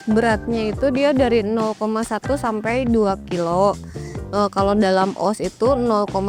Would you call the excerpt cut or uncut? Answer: uncut